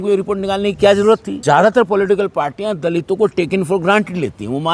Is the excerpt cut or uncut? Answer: cut